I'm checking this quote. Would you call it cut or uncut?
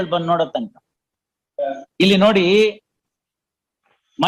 cut